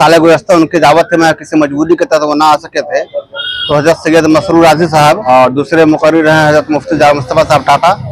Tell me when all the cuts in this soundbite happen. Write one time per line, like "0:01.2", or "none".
0:05.2